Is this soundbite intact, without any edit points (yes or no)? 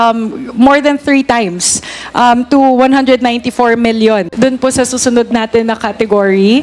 no